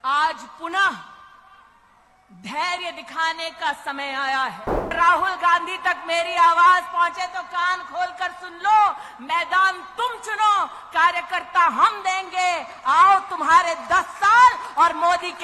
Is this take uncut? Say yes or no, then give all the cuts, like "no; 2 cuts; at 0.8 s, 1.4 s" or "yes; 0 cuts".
no; 1 cut; at 4.9 s